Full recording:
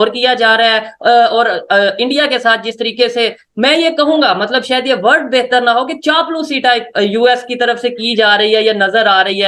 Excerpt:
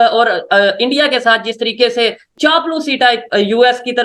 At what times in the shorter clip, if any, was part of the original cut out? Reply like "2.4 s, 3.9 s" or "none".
2.3 s